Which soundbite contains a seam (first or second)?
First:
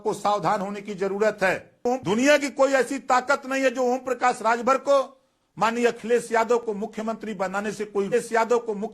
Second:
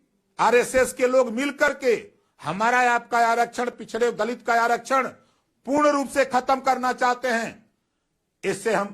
first